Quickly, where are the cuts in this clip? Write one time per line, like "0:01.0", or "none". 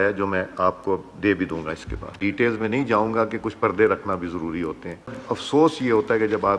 0:02.2
0:05.2